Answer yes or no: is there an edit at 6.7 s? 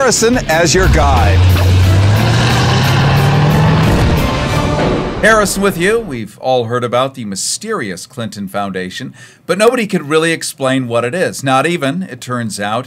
yes